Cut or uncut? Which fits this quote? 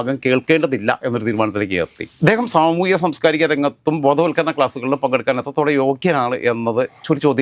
cut